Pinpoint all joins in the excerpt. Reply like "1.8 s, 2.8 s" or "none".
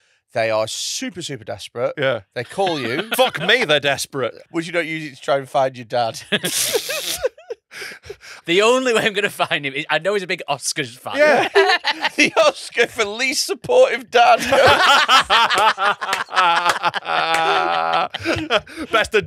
3.1 s, 4.5 s, 8.3 s, 12.1 s